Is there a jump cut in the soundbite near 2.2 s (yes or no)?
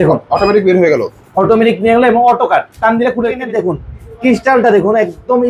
no